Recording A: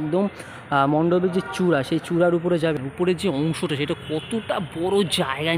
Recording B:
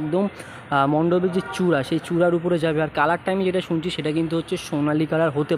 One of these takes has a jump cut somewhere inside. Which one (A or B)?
A